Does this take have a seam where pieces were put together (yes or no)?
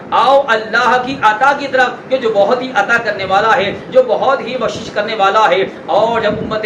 no